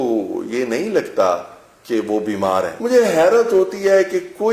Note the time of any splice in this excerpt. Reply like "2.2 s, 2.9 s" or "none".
2.8 s